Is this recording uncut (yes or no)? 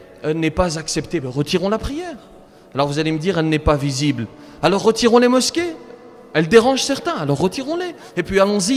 yes